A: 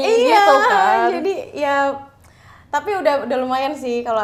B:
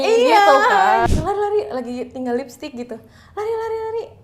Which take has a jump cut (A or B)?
B